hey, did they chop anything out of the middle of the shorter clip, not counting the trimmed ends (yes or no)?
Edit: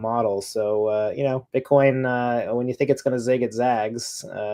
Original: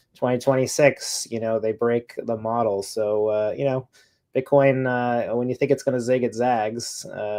yes